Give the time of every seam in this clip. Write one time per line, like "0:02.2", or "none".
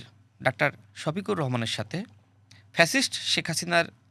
none